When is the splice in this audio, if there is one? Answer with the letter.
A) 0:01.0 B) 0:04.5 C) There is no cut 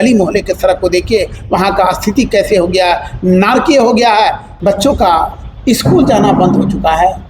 B